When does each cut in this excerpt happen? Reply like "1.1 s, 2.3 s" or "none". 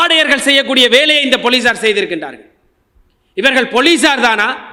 none